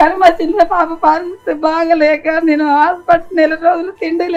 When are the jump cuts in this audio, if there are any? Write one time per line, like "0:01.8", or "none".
none